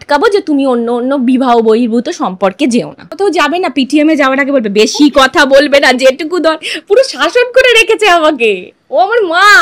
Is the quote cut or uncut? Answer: cut